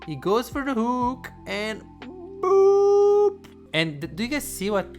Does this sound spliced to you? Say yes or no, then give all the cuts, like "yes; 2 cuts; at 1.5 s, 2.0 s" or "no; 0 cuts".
yes; 1 cut; at 3.5 s